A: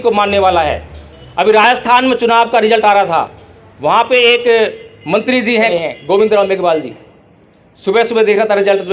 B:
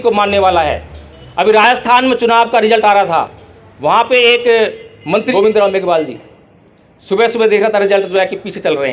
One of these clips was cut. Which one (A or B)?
B